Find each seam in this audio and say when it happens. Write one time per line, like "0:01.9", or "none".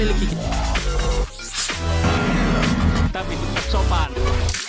none